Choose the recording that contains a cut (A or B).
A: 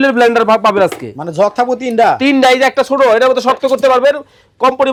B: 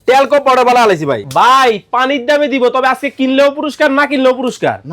B